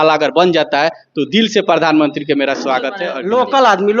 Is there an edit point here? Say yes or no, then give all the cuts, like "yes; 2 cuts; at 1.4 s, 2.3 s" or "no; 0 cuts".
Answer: yes; 1 cut; at 3.1 s